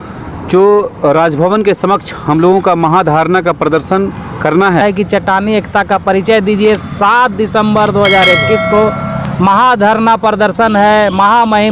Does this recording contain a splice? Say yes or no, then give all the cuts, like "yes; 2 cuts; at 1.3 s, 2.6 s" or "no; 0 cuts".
yes; 1 cut; at 4.8 s